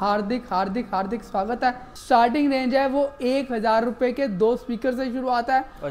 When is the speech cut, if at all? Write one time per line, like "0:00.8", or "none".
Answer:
0:01.9